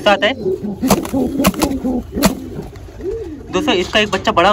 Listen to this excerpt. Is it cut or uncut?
uncut